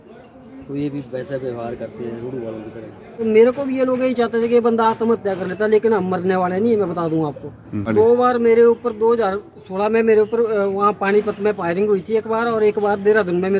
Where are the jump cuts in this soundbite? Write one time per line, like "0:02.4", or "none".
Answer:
0:03.2
0:07.9